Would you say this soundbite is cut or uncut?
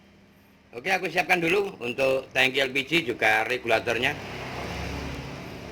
cut